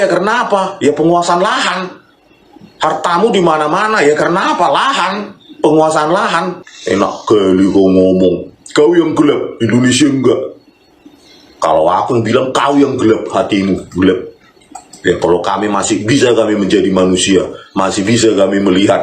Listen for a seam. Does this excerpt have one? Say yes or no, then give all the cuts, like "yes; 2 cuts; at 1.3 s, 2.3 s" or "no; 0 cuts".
no; 0 cuts